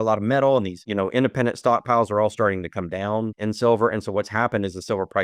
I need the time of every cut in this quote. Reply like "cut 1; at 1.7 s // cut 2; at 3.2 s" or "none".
cut 1; at 3.3 s

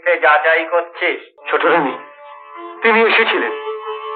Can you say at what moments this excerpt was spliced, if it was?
cut 1; at 1.3 s

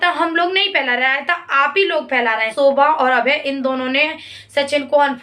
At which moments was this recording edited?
cut 1; at 2.5 s

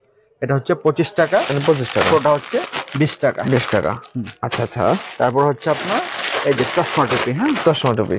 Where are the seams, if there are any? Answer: none

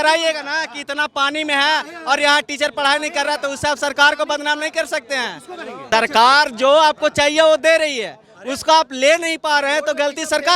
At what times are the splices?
cut 1; at 5.9 s

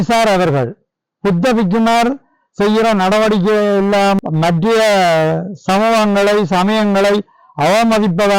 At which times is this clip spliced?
cut 1; at 4.2 s

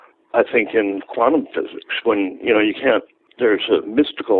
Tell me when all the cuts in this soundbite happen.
cut 1; at 3.2 s

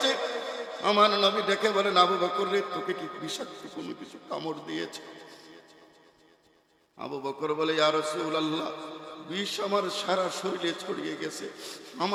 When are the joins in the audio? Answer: none

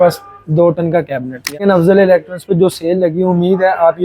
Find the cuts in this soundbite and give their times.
cut 1; at 1.6 s

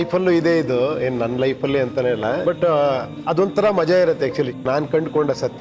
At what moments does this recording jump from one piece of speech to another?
cut 1; at 2.4 s // cut 2; at 3.1 s // cut 3; at 4.6 s

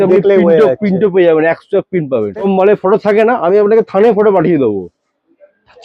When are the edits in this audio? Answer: cut 1; at 2.4 s

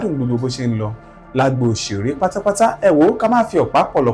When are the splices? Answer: none

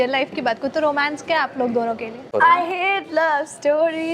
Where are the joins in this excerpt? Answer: cut 1; at 2.3 s

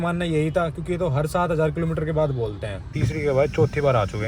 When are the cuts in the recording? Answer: cut 1; at 2.9 s

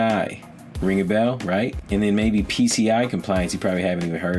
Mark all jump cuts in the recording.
cut 1; at 1.8 s

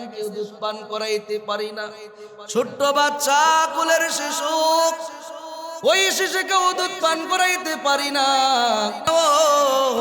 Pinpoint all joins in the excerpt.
cut 1; at 9.0 s

